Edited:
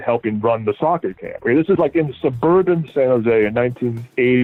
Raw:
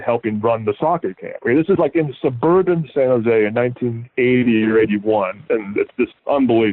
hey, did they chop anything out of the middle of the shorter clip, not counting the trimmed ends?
no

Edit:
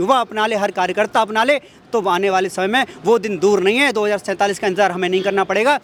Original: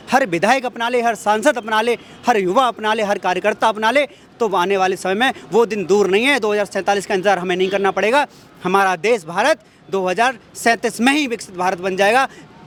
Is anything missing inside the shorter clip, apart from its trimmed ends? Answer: no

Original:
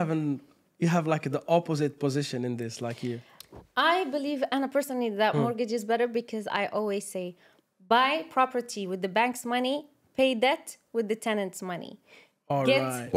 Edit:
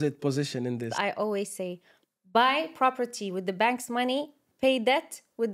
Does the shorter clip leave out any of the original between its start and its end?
yes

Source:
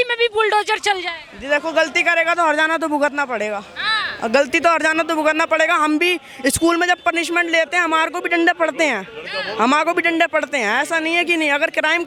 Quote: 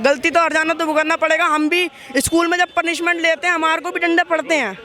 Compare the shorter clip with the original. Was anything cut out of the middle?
no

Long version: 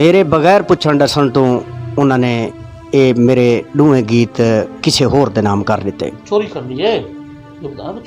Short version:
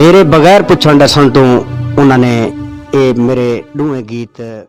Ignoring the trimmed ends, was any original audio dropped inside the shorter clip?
no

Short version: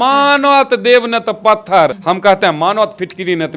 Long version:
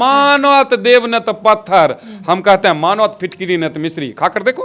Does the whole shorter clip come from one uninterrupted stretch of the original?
no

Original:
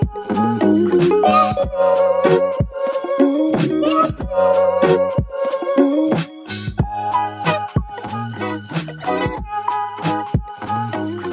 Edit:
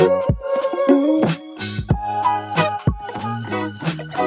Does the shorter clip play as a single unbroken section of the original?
no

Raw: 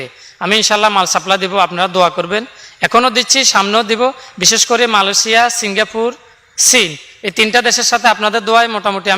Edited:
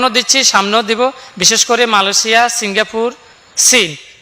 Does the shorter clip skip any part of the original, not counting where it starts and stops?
no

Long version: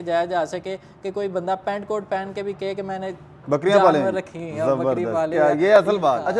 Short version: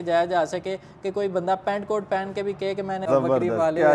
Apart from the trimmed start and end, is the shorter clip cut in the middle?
yes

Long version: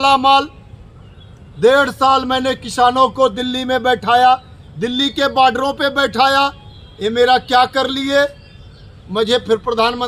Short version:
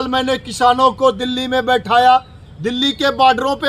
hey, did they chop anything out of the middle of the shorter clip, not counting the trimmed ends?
no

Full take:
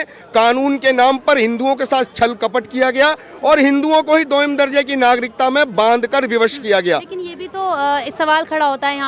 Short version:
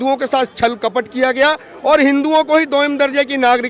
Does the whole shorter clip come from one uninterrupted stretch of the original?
yes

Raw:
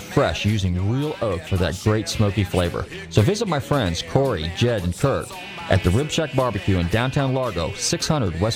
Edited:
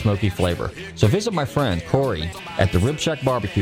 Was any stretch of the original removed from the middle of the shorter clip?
yes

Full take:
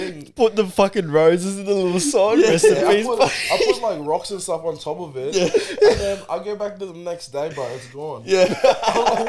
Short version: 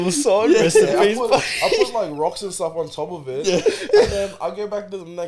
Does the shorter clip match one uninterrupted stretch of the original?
yes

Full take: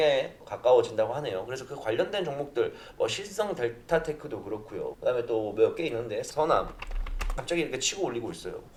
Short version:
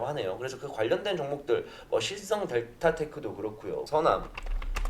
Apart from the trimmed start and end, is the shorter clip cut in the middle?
yes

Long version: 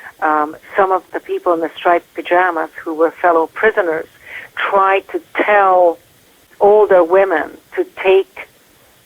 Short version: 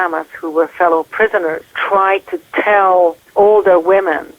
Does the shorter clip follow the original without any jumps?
no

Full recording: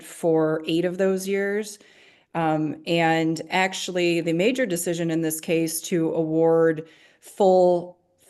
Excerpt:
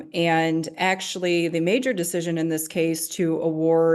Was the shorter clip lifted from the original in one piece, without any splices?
yes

